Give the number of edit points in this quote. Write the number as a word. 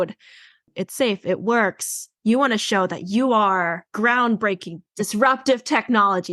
three